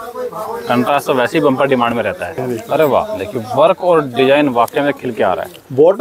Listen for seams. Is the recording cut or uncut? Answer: cut